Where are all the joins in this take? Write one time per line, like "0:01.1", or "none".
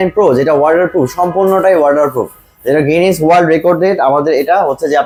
none

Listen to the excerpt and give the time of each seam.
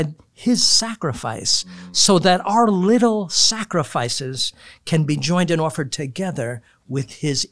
none

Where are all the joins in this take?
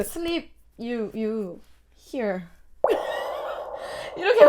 none

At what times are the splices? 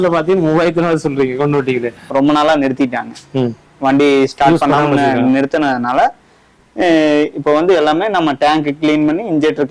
0:02.0

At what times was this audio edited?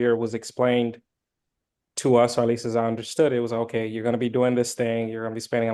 none

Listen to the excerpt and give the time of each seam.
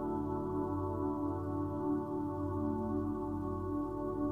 none

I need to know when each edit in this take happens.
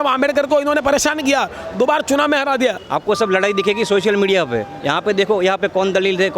0:02.8

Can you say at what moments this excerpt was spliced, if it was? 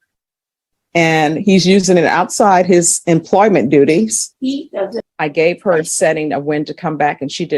0:05.0

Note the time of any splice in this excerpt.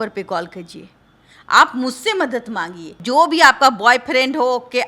0:02.9

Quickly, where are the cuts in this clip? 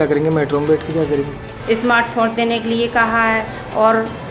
0:01.5

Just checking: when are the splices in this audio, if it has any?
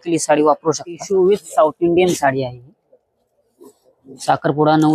0:01.0

